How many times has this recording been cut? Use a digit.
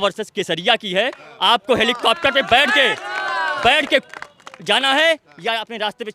0